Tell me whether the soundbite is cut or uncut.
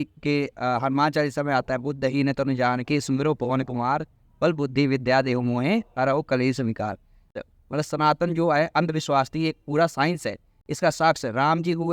cut